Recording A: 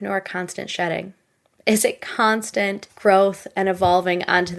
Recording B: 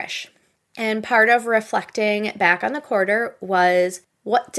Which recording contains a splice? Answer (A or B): A